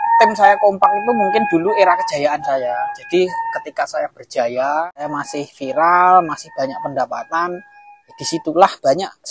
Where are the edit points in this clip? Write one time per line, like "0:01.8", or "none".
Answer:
0:04.9